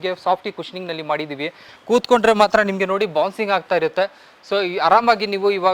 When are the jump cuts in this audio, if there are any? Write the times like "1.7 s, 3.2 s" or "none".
1.7 s